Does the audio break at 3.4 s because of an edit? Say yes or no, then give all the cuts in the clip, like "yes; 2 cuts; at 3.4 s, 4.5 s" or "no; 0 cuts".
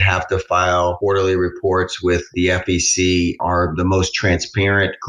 yes; 2 cuts; at 1.0 s, 3.4 s